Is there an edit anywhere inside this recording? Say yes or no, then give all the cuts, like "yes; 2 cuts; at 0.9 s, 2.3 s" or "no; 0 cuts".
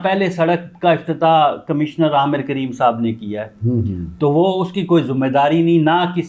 no; 0 cuts